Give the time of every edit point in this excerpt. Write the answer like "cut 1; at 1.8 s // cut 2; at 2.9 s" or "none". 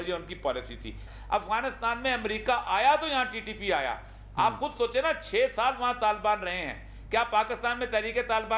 cut 1; at 1.1 s